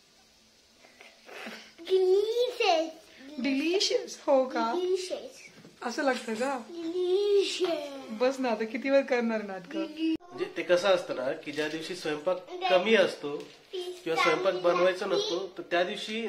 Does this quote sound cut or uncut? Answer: cut